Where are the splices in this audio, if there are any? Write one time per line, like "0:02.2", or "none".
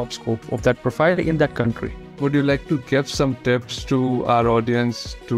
0:02.1